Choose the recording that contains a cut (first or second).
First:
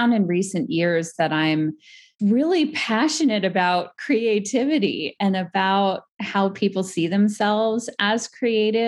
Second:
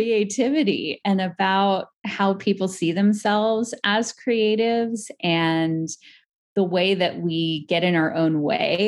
first